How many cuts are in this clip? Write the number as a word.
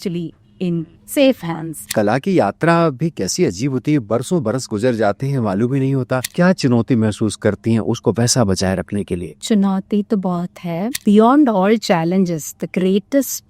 three